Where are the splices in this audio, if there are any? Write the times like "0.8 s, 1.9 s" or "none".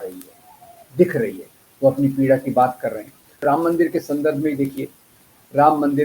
3.4 s